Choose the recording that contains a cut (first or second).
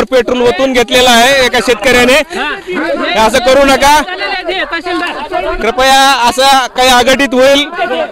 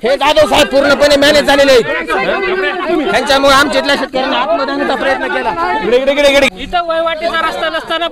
second